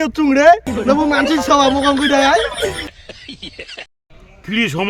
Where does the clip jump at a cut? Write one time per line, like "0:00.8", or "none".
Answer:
0:02.8